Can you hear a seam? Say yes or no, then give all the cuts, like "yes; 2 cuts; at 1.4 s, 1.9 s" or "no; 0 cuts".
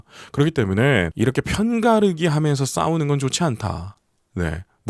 no; 0 cuts